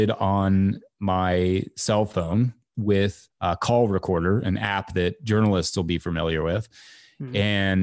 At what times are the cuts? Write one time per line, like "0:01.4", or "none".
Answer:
none